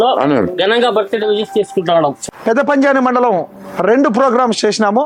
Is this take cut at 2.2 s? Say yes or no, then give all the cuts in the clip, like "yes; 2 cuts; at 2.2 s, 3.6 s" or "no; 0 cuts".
yes; 1 cut; at 2.2 s